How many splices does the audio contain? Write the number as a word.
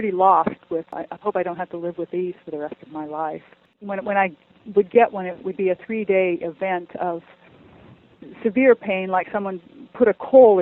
two